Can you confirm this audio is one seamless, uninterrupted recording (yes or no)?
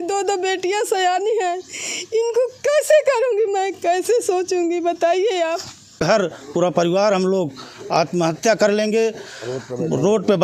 no